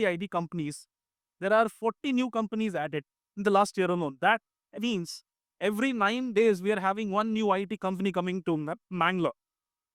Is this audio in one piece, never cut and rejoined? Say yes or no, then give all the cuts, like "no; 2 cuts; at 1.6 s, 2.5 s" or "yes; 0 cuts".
yes; 0 cuts